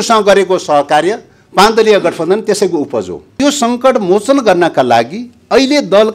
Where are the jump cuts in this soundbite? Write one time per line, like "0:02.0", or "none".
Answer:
0:03.4